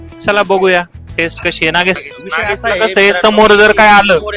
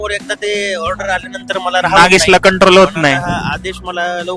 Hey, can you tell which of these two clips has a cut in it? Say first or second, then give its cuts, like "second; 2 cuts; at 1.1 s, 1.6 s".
first; 1 cut; at 2.0 s